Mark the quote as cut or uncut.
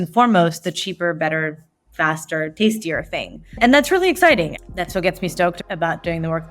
cut